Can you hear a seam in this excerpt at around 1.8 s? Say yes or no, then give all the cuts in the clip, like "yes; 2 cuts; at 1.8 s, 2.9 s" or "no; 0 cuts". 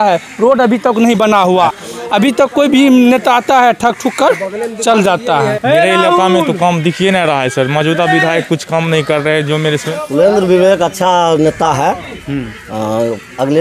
yes; 3 cuts; at 1.8 s, 5.6 s, 9.9 s